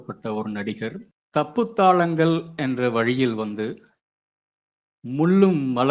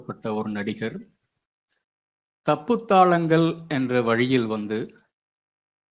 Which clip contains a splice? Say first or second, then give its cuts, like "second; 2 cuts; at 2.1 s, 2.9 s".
first; 1 cut; at 1.1 s